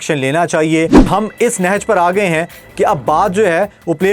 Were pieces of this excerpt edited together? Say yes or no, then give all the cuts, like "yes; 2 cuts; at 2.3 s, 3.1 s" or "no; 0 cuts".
yes; 1 cut; at 1.1 s